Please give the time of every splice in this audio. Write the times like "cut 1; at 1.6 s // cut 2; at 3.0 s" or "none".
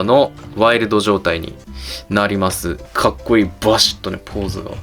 cut 1; at 2.7 s